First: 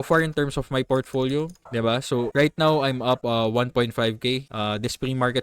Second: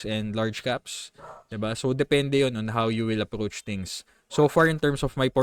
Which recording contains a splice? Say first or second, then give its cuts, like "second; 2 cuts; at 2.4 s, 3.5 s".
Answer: first; 3 cuts; at 2.0 s, 3.2 s, 4.5 s